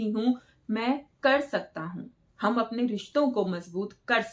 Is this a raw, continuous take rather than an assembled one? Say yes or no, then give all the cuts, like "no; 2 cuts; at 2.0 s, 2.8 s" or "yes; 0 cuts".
yes; 0 cuts